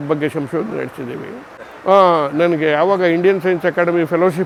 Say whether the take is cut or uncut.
uncut